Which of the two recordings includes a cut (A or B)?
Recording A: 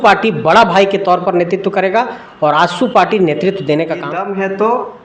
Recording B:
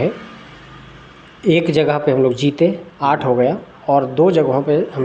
A